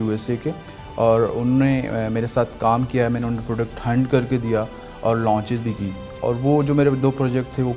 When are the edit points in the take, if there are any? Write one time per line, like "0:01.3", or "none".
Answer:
none